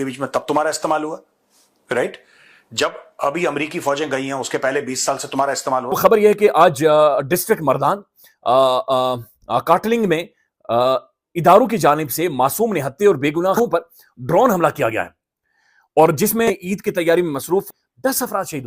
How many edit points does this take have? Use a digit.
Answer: 4